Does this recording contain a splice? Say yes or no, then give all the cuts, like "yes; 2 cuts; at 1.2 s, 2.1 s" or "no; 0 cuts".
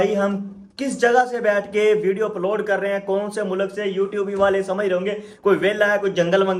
no; 0 cuts